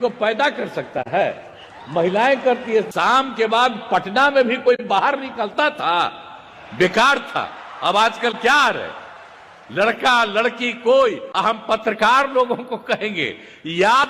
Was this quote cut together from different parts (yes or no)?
yes